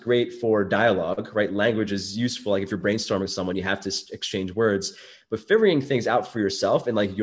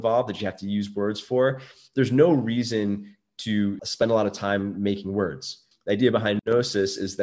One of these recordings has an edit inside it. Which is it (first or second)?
second